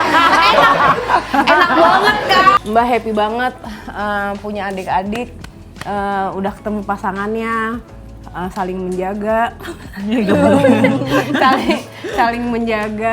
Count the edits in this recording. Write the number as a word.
one